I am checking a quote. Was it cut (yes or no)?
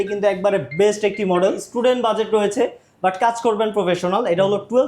yes